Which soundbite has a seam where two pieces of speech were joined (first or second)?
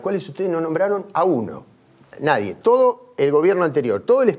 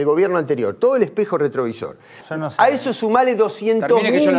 second